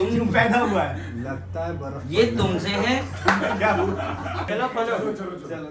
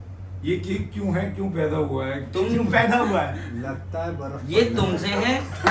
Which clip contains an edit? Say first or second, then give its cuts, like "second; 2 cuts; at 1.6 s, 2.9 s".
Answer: first; 1 cut; at 4.4 s